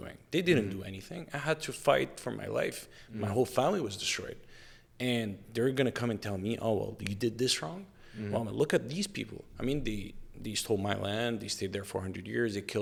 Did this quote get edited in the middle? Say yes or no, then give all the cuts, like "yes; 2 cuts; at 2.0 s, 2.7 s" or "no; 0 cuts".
no; 0 cuts